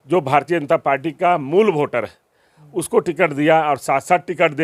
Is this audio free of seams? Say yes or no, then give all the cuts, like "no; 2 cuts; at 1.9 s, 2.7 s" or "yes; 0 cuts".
yes; 0 cuts